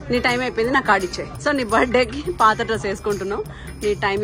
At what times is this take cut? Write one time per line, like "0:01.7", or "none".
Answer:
0:01.3